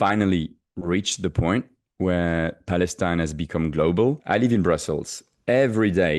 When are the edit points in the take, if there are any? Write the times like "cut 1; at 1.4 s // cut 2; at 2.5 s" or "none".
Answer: cut 1; at 4.2 s